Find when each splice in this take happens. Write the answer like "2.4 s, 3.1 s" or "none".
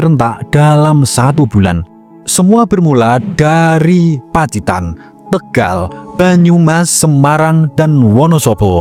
none